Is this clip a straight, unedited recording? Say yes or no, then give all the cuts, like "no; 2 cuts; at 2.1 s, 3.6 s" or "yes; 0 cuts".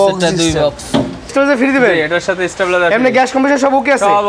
no; 1 cut; at 1.3 s